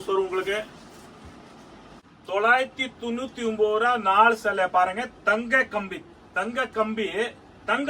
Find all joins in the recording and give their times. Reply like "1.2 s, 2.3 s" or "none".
2.3 s